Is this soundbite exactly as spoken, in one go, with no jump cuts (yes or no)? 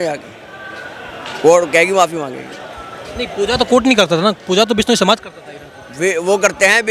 yes